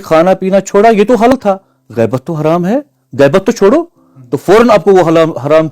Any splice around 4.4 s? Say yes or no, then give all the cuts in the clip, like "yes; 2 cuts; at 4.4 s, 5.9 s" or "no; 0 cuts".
no; 1 cut; at 1.3 s